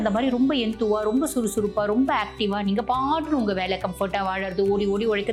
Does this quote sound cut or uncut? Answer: uncut